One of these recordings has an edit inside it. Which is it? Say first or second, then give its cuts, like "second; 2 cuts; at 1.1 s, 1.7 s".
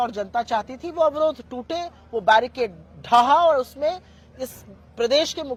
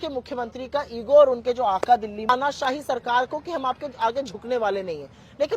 second; 1 cut; at 2.3 s